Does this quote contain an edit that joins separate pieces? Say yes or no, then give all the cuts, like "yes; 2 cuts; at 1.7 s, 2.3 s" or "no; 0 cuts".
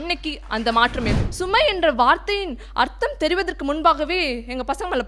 yes; 1 cut; at 1.2 s